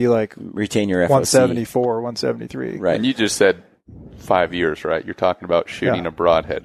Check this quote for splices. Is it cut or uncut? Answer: uncut